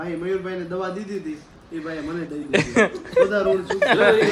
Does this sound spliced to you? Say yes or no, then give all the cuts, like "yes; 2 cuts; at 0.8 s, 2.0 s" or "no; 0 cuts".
no; 0 cuts